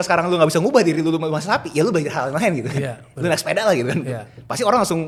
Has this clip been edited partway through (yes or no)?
no